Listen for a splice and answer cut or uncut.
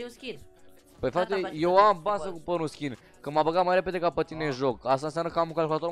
uncut